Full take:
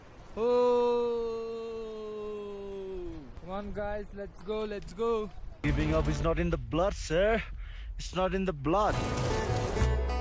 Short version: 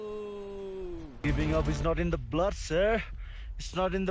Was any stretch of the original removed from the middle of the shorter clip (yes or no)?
yes